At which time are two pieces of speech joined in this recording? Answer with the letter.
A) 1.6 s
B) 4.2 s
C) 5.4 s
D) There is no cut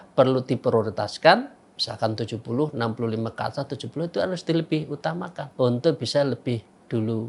C